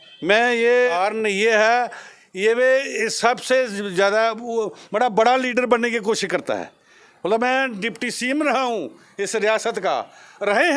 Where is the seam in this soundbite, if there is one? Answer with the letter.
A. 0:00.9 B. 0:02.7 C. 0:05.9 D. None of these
A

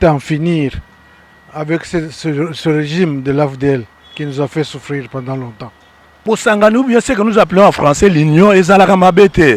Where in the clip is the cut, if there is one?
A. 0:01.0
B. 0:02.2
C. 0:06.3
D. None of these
C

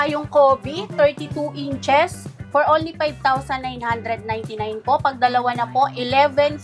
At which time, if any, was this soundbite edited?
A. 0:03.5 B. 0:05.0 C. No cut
C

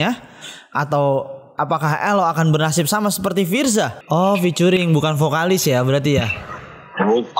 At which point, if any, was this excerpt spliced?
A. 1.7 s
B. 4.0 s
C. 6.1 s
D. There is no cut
B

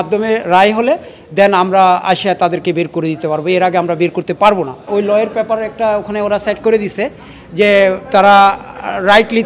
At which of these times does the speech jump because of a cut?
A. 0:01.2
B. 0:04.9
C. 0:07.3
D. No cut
B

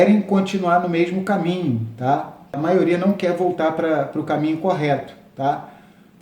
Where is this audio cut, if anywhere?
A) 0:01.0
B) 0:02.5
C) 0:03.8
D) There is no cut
B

